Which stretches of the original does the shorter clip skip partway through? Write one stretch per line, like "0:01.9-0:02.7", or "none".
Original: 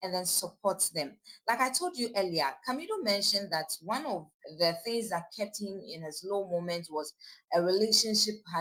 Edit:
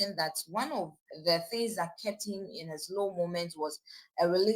none